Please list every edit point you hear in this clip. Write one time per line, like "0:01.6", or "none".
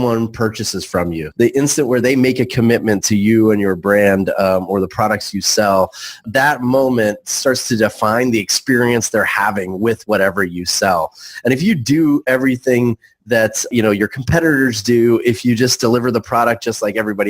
0:01.2
0:06.2
0:13.7